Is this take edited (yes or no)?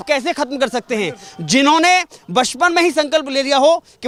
no